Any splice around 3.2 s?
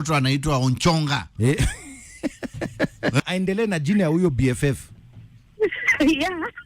yes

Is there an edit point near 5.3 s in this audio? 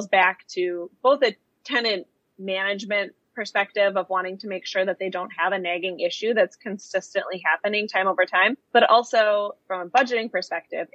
no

